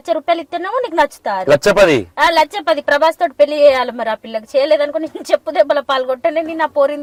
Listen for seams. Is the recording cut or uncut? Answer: uncut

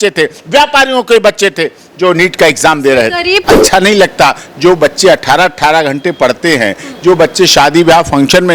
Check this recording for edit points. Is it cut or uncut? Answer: cut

